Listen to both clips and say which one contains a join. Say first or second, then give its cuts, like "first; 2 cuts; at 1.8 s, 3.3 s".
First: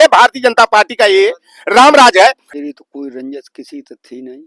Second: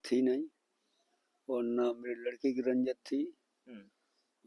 first; 1 cut; at 2.4 s